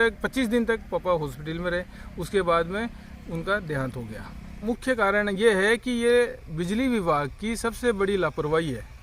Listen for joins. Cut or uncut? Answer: cut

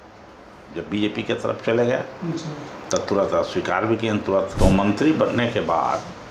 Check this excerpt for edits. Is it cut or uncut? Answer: cut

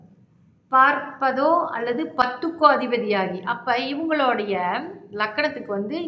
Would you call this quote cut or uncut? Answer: cut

